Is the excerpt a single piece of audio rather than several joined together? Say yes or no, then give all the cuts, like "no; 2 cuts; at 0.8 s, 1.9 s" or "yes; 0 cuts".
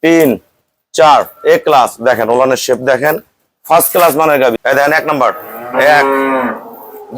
no; 1 cut; at 4.6 s